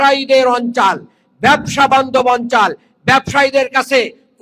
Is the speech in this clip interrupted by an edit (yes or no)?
no